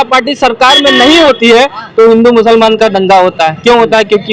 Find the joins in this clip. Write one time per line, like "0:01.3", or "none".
none